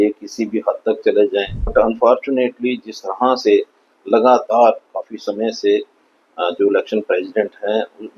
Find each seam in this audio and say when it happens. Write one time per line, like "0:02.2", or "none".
0:01.7